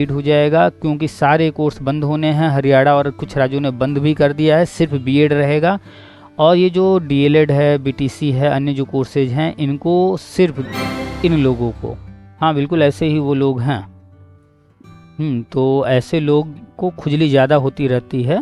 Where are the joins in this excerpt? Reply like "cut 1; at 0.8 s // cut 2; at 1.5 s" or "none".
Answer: cut 1; at 10.6 s